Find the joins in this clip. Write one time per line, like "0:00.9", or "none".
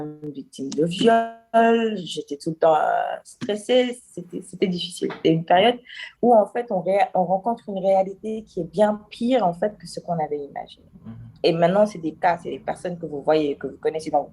none